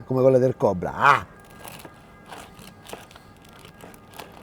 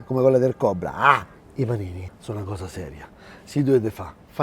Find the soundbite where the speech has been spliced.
second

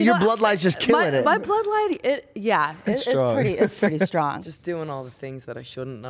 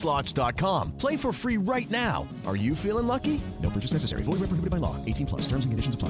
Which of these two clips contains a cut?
first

